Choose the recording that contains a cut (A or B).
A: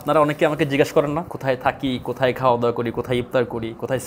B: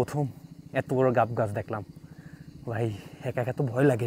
A